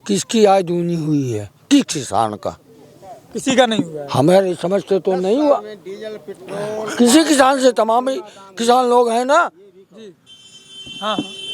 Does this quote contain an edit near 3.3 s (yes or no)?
no